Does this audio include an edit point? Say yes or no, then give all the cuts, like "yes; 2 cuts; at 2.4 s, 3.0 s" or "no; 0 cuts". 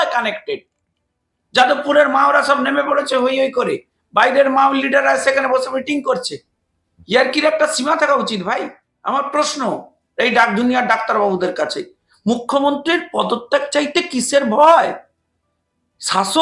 yes; 1 cut; at 8.9 s